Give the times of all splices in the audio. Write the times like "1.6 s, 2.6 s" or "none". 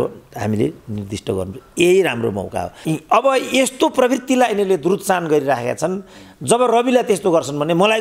2.8 s